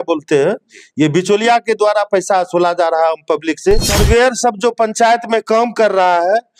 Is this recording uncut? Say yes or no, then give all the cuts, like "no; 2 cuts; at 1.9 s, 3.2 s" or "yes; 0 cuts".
no; 1 cut; at 3.9 s